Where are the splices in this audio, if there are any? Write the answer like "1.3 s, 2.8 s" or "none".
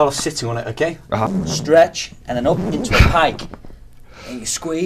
1.3 s